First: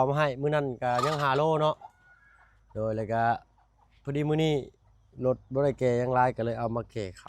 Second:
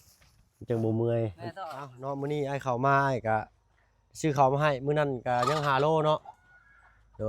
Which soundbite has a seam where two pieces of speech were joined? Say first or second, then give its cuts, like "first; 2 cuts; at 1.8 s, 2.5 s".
second; 1 cut; at 2.0 s